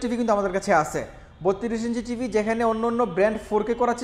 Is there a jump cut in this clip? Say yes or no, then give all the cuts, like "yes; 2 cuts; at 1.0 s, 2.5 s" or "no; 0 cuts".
no; 0 cuts